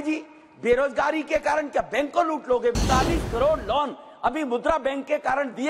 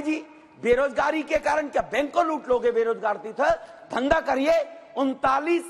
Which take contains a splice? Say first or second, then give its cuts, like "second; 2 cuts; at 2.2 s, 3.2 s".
first; 1 cut; at 2.7 s